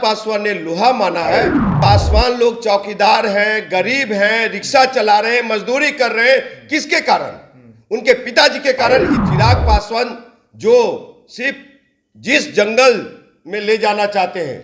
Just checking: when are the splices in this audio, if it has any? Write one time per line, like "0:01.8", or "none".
0:01.7
0:09.2